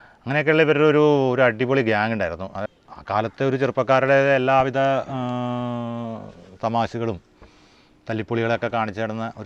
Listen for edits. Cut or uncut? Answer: cut